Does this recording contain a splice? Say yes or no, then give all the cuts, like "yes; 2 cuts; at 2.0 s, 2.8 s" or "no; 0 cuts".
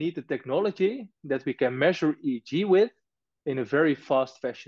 no; 0 cuts